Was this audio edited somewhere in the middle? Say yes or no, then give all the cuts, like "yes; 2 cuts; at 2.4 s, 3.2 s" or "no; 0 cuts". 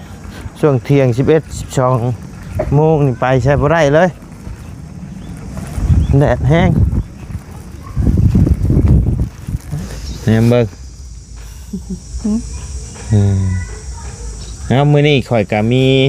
yes; 1 cut; at 9.7 s